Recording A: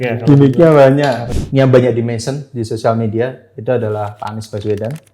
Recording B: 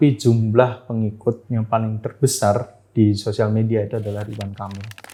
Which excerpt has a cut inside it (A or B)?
A